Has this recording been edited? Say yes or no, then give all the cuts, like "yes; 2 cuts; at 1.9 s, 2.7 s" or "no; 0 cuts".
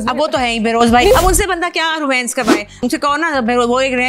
yes; 2 cuts; at 1.1 s, 2.8 s